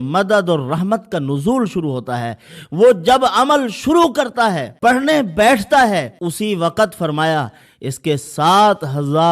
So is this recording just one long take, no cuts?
no; 2 cuts; at 4.7 s, 6.2 s

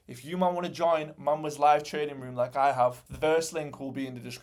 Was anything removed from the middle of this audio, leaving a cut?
no; 0 cuts

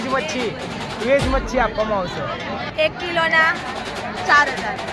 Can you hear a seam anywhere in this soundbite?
yes; 1 cut; at 2.6 s

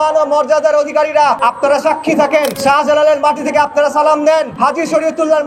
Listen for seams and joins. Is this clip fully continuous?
no; 3 cuts; at 1.4 s, 2.6 s, 4.5 s

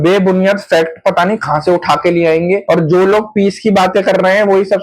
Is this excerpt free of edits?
no; 1 cut; at 2.6 s

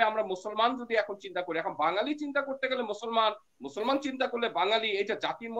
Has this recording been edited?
no; 0 cuts

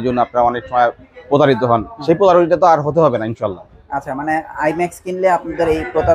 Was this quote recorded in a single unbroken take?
yes; 0 cuts

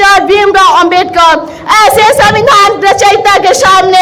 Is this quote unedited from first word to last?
yes; 0 cuts

